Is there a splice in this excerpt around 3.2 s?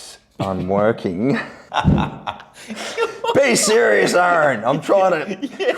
no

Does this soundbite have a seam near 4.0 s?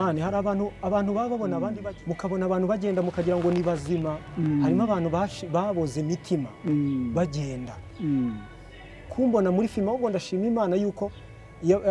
no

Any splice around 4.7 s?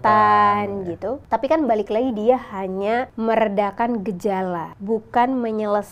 yes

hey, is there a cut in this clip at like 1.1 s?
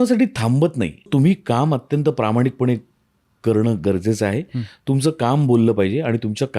yes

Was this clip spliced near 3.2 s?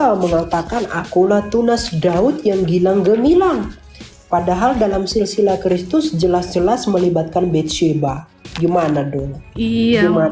no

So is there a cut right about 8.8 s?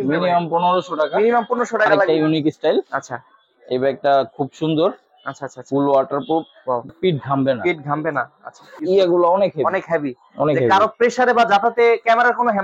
yes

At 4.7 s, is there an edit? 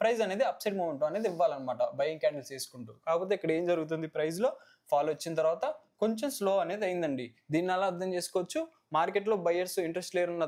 no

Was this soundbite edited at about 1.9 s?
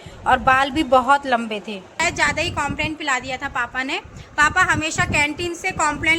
yes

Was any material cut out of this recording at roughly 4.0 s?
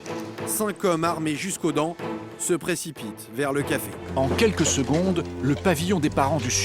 yes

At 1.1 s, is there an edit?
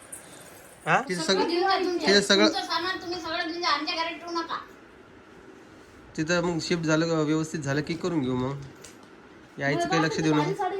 yes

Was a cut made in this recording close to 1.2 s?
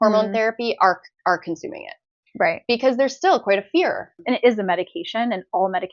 no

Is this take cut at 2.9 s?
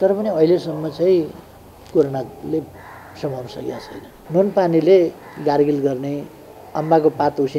no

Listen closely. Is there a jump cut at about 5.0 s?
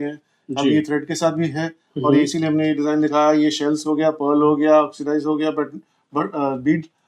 no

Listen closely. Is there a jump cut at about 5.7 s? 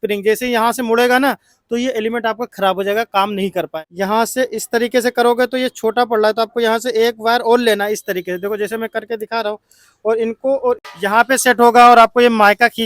no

